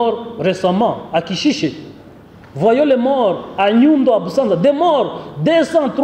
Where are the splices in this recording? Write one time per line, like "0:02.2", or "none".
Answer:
none